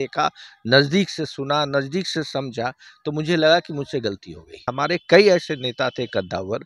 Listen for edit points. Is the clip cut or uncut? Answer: cut